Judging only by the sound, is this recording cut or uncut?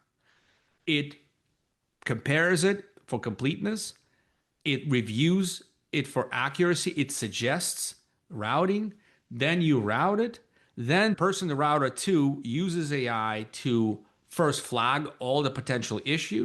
cut